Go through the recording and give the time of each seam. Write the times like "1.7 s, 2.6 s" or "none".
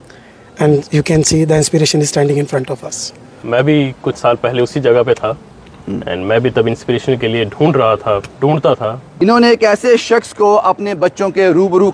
3.4 s, 9.0 s